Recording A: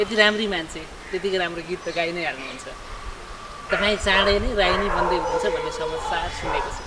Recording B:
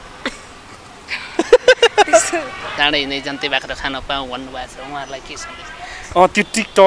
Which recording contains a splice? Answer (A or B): B